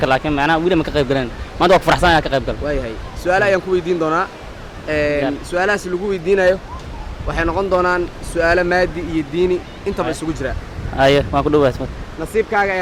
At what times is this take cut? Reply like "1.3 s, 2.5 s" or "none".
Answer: none